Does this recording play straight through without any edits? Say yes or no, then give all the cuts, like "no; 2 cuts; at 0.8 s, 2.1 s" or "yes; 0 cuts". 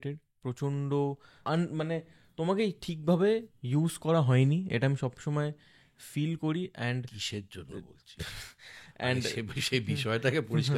yes; 0 cuts